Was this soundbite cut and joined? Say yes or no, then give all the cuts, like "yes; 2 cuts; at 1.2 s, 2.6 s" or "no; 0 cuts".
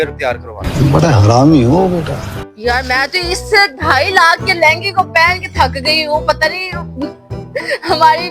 yes; 1 cut; at 2.4 s